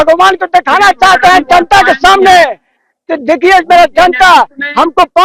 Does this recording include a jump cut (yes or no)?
no